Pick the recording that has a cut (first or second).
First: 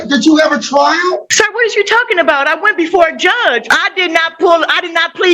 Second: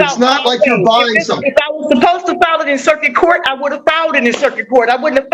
first